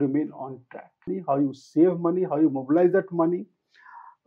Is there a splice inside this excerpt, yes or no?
yes